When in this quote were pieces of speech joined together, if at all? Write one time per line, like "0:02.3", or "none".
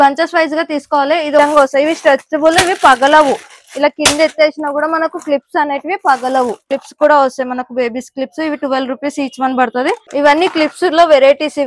0:01.4
0:06.8
0:10.0